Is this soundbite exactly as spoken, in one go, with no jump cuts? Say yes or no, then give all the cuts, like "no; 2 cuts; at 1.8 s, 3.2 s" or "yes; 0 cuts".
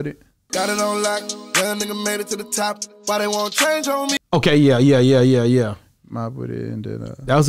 yes; 0 cuts